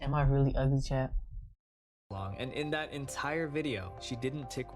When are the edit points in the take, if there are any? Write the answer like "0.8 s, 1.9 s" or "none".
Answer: 2.0 s